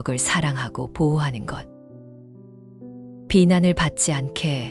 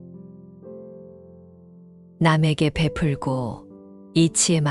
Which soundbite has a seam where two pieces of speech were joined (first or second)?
first